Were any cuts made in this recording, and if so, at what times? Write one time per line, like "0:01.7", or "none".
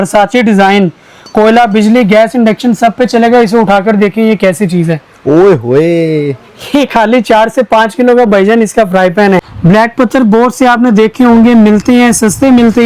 0:09.4